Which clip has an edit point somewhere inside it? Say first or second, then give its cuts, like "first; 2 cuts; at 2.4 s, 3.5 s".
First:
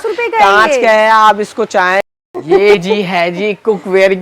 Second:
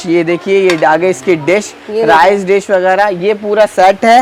first; 1 cut; at 2.1 s